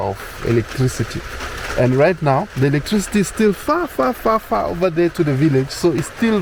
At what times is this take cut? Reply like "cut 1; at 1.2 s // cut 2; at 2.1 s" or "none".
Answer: none